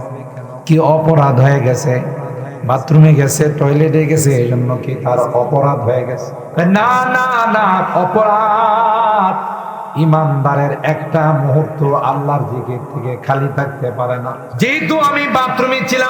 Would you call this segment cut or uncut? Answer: cut